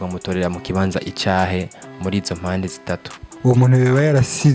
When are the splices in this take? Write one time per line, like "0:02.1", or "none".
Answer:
0:03.2

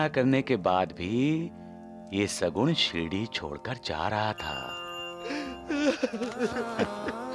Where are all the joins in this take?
none

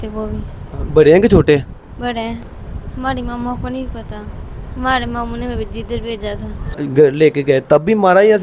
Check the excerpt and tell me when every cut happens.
0:02.5
0:06.8

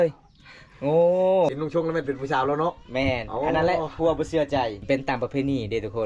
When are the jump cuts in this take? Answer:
0:01.5
0:04.8

